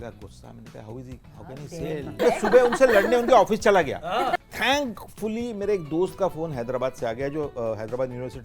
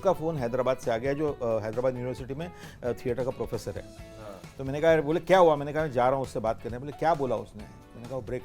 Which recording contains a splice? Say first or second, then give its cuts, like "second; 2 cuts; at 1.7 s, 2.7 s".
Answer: first; 2 cuts; at 2.2 s, 4.4 s